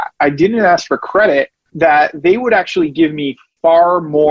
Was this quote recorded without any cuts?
no; 1 cut; at 1.6 s

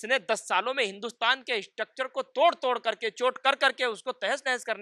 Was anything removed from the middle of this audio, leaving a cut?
no; 0 cuts

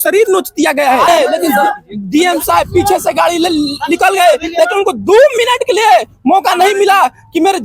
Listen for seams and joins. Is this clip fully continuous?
no; 1 cut; at 1.1 s

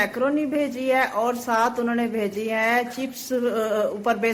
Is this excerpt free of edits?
yes; 0 cuts

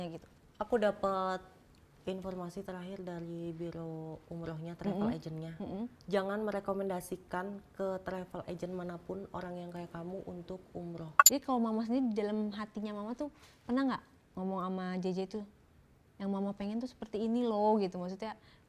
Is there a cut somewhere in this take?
yes; 2 cuts; at 6.0 s, 11.1 s

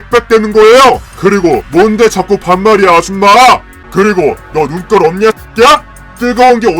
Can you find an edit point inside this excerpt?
yes; 1 cut; at 3.8 s

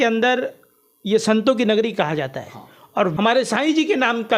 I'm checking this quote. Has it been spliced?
yes; 1 cut; at 3.1 s

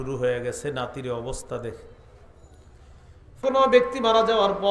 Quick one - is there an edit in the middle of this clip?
yes; 1 cut; at 3.4 s

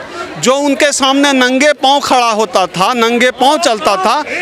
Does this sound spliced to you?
no; 0 cuts

